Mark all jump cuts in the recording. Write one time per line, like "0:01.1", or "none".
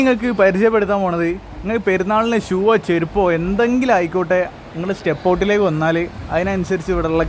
none